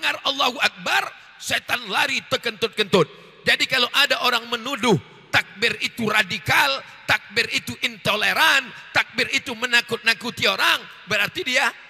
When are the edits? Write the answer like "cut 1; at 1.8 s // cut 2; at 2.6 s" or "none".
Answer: none